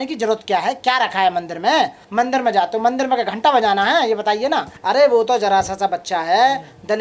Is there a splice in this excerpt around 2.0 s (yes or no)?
yes